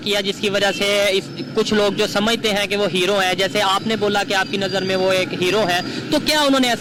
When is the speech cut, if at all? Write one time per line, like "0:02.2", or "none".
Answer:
none